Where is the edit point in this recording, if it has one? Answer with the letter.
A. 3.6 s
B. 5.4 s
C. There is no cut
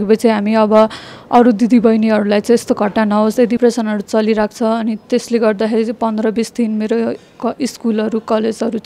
A